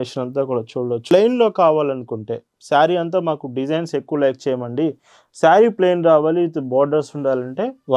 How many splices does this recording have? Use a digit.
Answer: 1